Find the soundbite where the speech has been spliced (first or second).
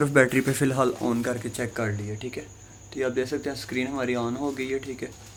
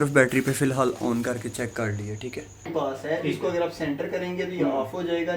second